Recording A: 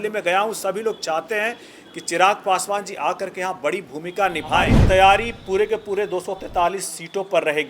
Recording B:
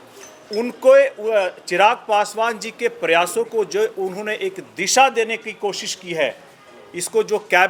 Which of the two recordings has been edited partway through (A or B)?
A